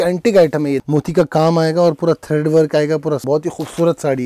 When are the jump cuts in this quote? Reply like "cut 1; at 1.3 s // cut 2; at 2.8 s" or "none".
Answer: cut 1; at 0.8 s // cut 2; at 3.2 s